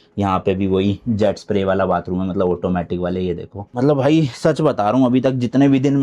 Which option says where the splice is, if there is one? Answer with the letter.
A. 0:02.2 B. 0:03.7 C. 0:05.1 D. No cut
B